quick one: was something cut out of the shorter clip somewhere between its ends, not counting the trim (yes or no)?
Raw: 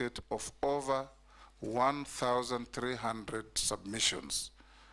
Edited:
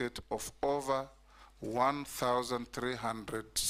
no